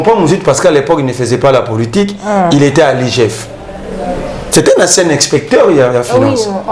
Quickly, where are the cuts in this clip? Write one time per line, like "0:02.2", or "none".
none